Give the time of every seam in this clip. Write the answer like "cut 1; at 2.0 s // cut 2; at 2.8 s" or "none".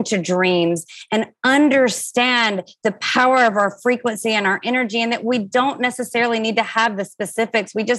none